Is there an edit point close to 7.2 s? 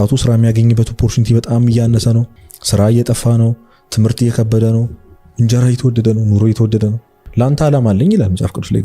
yes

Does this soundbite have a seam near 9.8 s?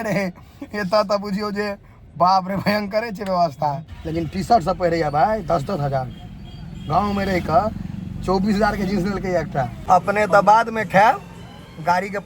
yes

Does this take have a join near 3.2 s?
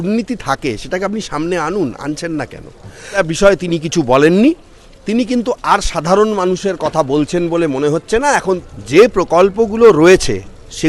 yes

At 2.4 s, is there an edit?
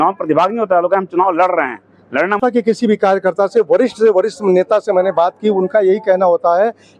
yes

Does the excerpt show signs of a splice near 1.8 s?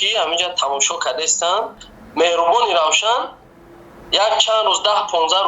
yes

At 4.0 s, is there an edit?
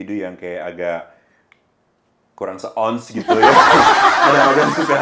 no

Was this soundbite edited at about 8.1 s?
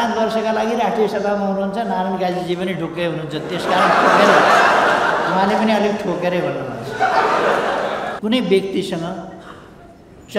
yes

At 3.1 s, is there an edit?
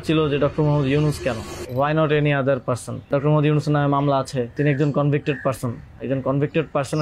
yes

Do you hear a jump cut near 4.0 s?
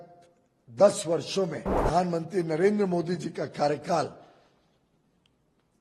no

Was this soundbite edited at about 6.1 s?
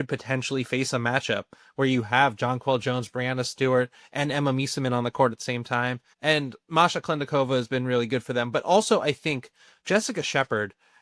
yes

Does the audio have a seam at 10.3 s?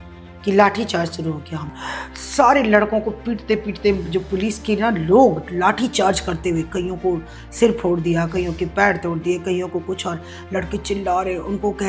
no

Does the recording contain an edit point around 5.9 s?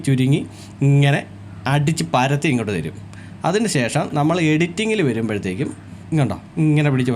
yes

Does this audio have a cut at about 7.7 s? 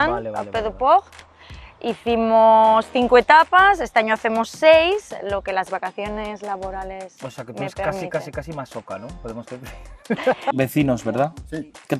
no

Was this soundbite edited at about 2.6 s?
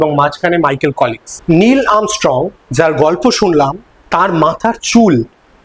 no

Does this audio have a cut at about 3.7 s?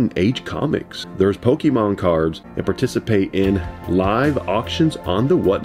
no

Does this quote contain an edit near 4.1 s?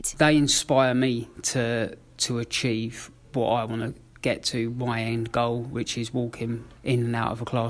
no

